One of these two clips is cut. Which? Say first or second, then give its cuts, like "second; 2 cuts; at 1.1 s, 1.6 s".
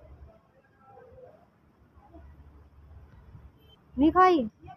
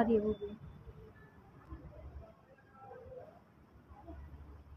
first; 1 cut; at 3.8 s